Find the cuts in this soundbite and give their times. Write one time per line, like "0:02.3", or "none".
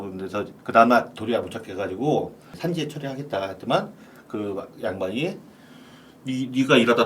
0:02.5